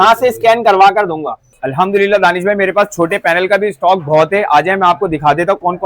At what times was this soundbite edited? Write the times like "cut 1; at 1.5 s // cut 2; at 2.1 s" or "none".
cut 1; at 1.6 s